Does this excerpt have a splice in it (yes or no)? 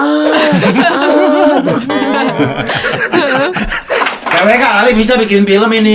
yes